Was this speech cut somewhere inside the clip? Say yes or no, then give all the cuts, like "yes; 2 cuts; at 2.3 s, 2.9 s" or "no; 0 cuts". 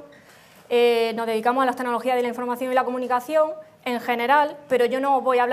yes; 1 cut; at 1.4 s